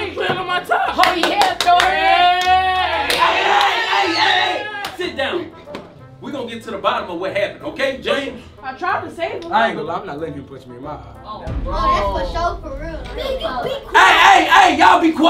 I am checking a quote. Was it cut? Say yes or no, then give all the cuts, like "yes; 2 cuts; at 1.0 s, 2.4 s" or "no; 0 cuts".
no; 0 cuts